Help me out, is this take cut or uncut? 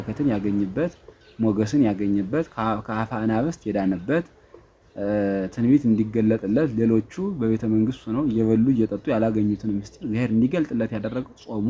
uncut